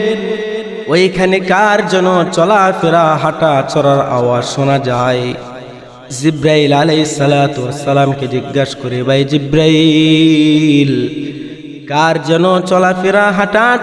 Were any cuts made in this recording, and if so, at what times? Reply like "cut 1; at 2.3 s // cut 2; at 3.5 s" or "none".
none